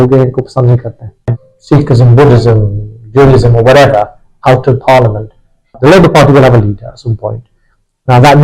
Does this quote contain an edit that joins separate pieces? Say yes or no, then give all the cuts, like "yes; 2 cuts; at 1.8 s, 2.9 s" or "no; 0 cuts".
yes; 2 cuts; at 1.3 s, 5.8 s